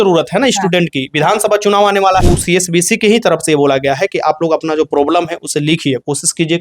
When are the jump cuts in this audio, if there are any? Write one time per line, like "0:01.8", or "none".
0:02.2